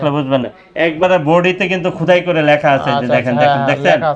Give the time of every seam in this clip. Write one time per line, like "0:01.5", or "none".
none